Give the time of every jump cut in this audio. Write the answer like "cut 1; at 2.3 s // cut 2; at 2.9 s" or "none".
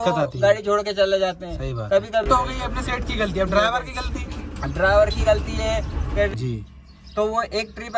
cut 1; at 2.2 s // cut 2; at 6.3 s